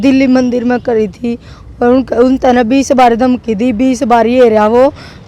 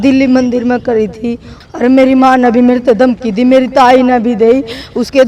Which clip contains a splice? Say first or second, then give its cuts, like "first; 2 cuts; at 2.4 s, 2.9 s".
second; 1 cut; at 1.6 s